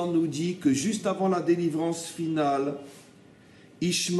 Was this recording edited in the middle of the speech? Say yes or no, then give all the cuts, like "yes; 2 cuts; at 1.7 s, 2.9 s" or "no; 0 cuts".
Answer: no; 0 cuts